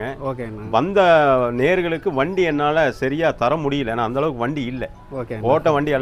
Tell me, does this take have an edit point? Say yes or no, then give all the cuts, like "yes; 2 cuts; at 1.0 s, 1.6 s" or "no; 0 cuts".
no; 0 cuts